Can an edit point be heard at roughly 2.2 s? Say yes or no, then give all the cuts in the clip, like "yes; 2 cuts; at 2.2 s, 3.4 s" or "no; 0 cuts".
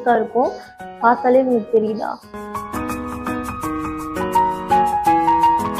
yes; 1 cut; at 2.2 s